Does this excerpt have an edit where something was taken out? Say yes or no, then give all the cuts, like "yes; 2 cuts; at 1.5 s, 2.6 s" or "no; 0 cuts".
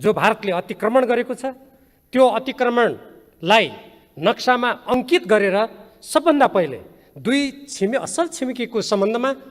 no; 0 cuts